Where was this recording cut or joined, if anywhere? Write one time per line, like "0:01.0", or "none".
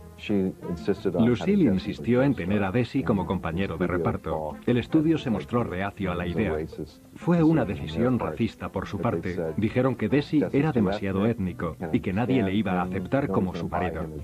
0:11.2